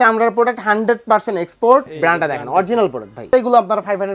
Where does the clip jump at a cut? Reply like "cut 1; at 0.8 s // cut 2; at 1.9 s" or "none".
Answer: cut 1; at 1.9 s // cut 2; at 3.3 s